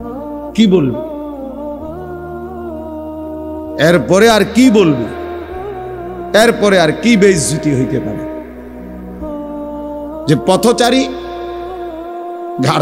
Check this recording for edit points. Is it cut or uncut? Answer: uncut